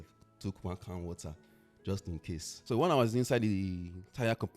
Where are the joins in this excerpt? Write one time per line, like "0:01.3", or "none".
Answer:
0:02.5